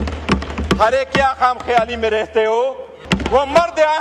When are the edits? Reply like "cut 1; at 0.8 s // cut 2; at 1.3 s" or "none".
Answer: cut 1; at 3.0 s